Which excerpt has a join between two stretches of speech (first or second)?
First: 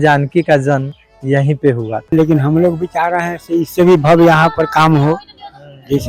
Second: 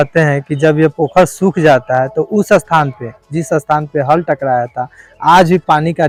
first